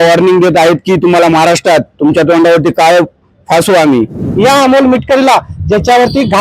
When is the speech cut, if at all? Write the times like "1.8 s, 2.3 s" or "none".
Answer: 4.2 s